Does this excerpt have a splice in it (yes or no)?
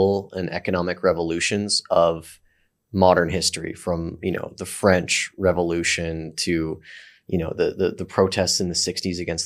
no